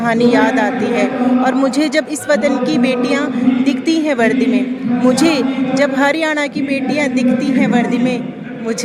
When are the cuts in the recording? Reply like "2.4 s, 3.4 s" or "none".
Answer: none